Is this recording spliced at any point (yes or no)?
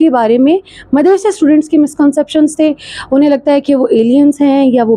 no